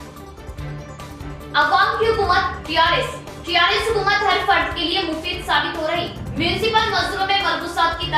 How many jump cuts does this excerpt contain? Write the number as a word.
one